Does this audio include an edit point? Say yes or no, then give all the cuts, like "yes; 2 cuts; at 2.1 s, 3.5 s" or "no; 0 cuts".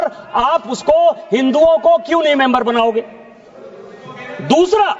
no; 0 cuts